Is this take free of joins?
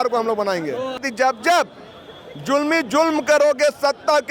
no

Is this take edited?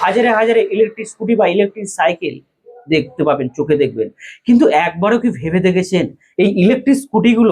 no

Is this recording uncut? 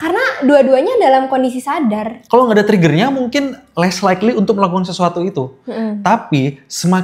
no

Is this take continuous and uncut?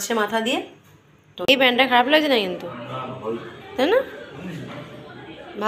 no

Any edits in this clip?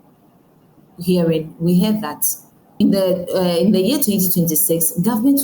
no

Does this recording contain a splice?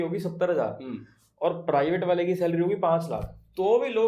no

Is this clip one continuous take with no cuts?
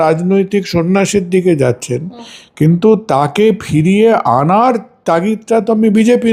yes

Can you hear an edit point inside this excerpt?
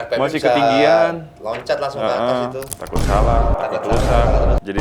yes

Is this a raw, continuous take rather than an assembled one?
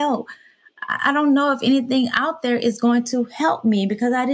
yes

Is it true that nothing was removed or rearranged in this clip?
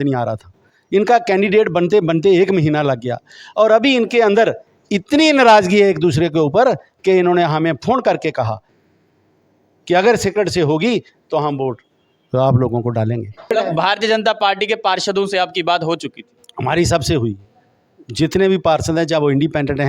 no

